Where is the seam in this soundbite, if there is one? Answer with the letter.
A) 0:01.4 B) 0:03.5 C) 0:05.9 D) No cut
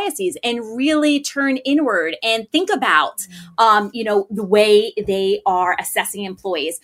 D